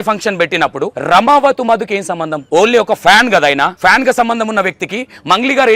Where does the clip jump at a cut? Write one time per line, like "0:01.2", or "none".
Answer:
0:00.9
0:02.3
0:03.7